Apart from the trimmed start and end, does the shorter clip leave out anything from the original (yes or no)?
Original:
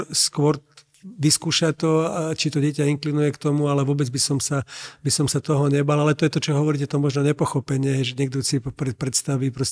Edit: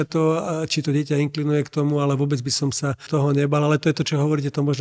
yes